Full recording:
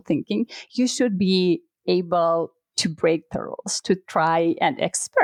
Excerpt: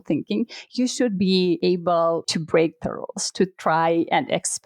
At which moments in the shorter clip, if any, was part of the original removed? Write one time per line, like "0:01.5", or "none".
0:01.9

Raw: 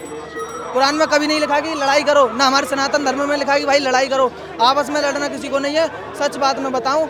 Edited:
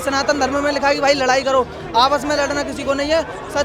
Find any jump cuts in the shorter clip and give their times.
none

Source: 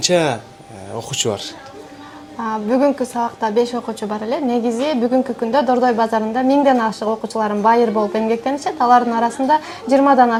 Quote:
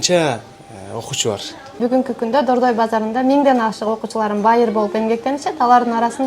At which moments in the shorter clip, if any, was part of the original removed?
0:01.8

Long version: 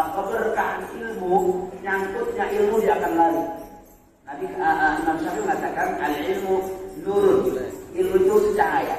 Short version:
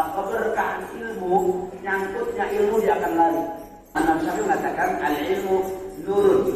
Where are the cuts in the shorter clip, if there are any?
0:04.0

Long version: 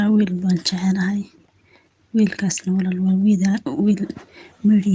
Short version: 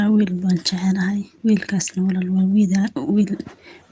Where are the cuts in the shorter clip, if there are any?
0:01.3

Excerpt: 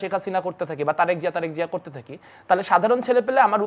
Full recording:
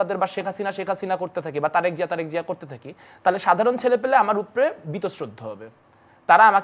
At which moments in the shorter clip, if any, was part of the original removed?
none

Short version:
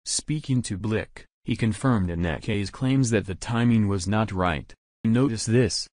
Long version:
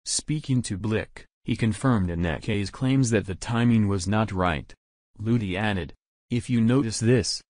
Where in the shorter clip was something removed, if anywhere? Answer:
0:05.0

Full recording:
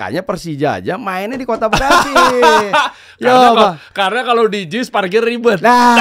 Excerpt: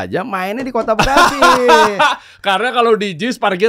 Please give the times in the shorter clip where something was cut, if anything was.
0:02.3

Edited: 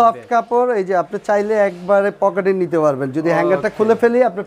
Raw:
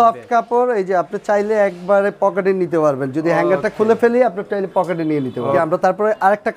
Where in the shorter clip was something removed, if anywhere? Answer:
none

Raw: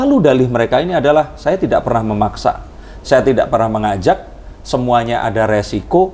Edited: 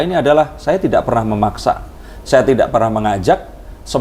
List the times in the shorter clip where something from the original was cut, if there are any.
none

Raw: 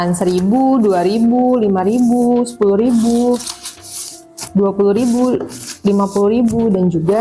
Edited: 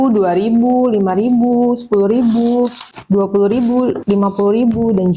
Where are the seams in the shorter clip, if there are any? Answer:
0:02.9
0:04.0

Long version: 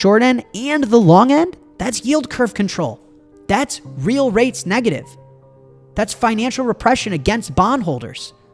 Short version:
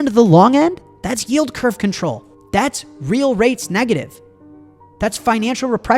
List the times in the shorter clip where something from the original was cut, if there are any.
0:02.3

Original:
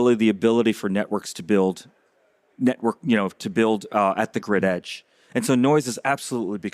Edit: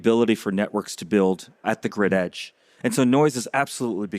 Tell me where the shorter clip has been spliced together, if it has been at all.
0:01.6

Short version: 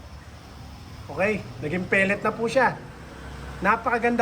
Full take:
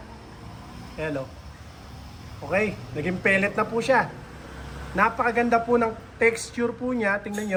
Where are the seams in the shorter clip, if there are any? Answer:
none

